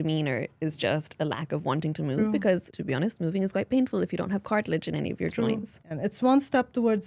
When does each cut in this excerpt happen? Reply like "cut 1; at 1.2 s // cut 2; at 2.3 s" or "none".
cut 1; at 2.7 s // cut 2; at 5.7 s

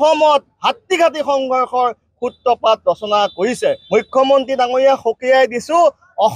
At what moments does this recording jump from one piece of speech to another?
cut 1; at 3.8 s

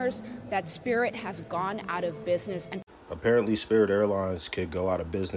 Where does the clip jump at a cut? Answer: cut 1; at 2.8 s

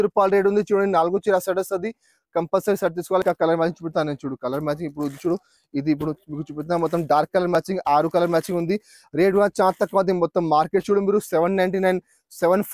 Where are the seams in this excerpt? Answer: cut 1; at 3.2 s

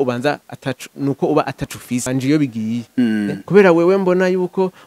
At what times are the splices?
cut 1; at 2.1 s

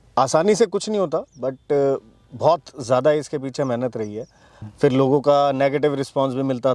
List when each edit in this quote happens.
cut 1; at 4.7 s

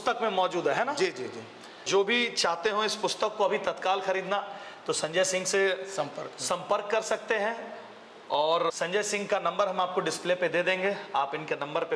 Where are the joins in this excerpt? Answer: cut 1; at 1.9 s // cut 2; at 8.8 s

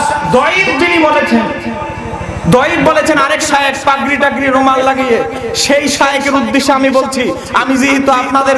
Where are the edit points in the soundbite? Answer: none

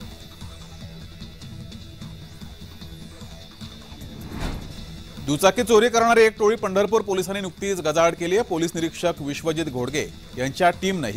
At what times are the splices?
none

